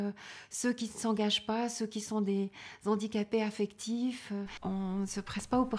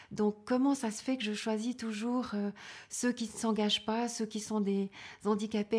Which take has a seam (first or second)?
first